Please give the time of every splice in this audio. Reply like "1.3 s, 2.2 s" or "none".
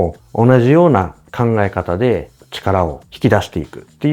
1.2 s, 2.5 s